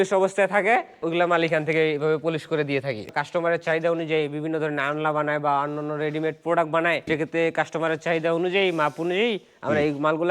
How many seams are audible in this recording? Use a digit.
3